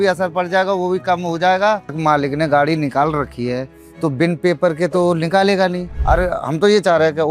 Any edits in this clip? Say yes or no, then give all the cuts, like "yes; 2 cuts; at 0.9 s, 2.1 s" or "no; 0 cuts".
yes; 2 cuts; at 2.0 s, 5.9 s